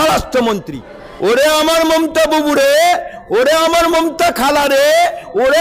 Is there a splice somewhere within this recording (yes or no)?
yes